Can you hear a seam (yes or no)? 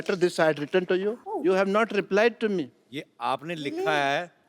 yes